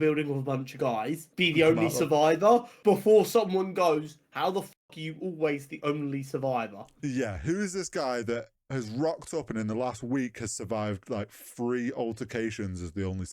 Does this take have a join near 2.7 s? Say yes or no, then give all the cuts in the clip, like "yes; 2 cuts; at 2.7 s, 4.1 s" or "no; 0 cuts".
yes; 3 cuts; at 1.2 s, 2.7 s, 6.9 s